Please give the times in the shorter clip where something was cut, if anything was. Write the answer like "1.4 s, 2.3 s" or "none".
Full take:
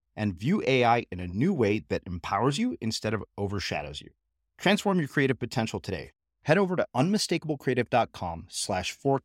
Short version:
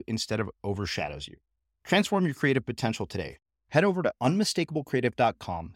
none